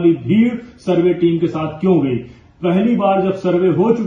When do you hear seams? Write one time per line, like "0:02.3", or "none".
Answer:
none